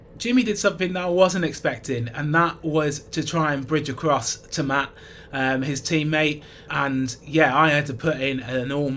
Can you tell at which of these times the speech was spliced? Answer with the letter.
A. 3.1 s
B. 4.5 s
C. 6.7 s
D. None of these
C